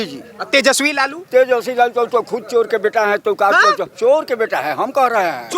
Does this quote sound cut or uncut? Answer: uncut